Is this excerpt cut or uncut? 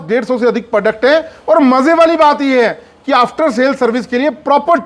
uncut